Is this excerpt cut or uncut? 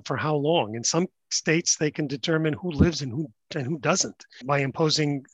cut